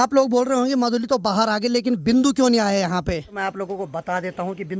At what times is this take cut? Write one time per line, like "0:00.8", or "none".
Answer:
0:03.4